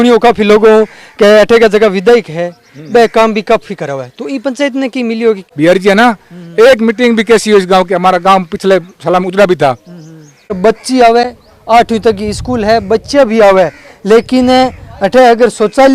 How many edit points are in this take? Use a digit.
2